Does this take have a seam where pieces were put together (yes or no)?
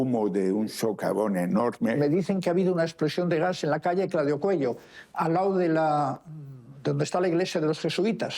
yes